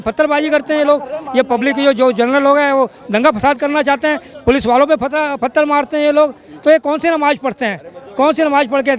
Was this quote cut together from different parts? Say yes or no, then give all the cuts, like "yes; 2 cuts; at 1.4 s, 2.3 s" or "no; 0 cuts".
no; 0 cuts